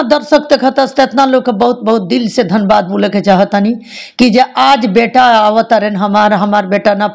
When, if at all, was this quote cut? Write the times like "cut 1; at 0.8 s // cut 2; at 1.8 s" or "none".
none